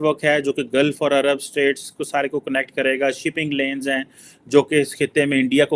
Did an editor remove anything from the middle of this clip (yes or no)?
no